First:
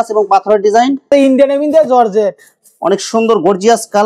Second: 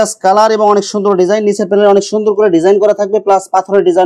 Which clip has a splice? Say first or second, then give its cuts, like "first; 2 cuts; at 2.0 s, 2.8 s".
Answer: first; 1 cut; at 1.1 s